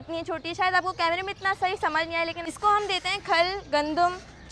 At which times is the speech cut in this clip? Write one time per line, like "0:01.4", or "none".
0:02.4